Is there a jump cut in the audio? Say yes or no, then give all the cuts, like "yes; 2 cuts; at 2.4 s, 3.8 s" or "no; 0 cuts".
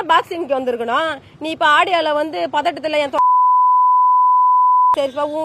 no; 0 cuts